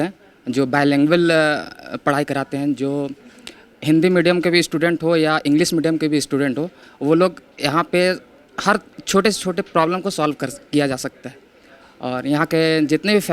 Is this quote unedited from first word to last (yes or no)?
yes